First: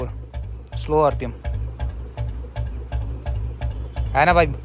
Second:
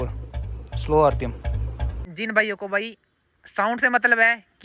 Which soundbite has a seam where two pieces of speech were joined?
second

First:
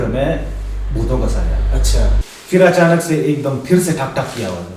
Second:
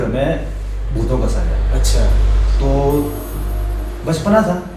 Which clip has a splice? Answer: first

